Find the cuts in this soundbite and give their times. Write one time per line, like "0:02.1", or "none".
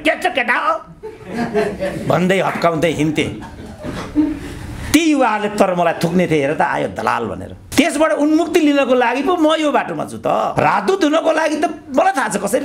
none